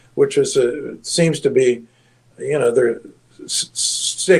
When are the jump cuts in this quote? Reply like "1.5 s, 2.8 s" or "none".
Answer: none